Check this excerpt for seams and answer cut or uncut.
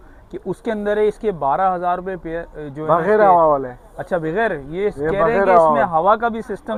uncut